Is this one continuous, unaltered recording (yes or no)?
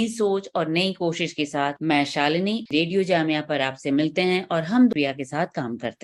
no